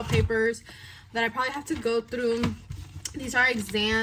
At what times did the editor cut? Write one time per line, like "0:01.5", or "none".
none